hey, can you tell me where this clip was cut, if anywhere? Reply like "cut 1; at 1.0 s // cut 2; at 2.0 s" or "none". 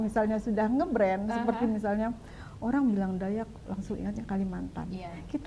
none